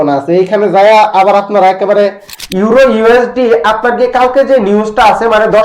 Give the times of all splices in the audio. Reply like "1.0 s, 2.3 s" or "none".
2.3 s

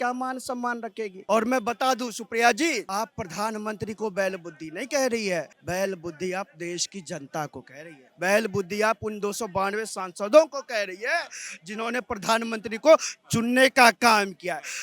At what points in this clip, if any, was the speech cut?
1.1 s, 5.6 s

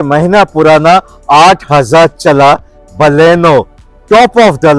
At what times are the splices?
none

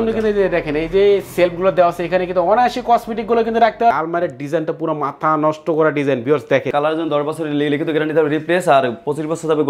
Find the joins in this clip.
3.9 s, 6.7 s

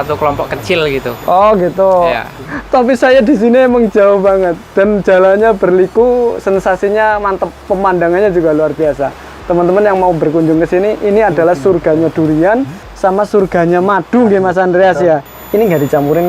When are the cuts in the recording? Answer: 2.4 s, 15.3 s

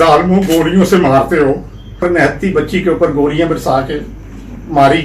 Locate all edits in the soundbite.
2.0 s

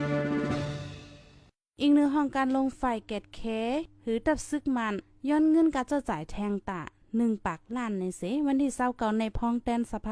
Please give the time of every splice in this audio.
none

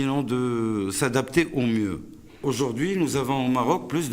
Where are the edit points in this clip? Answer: 2.4 s

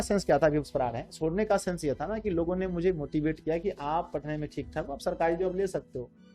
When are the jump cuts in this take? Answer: none

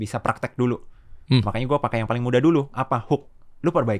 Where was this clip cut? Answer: none

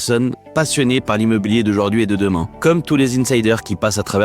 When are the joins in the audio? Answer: 2.5 s

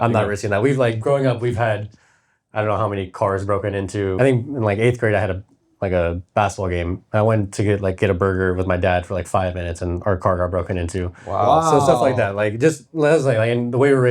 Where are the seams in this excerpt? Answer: 4.1 s

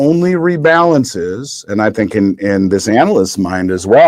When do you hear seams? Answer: none

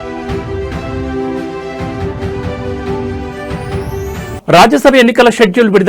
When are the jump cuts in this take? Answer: 4.3 s

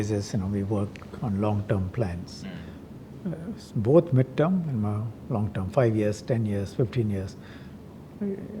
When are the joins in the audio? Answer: none

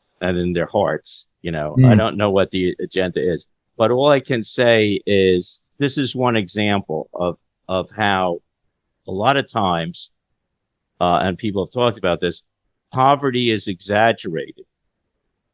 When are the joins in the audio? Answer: 3.7 s, 5.7 s

